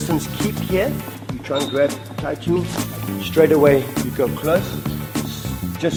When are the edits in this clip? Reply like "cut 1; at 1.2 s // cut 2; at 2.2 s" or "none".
none